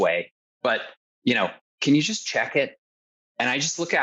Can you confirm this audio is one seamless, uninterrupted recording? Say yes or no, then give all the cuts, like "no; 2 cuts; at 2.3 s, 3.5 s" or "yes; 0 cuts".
yes; 0 cuts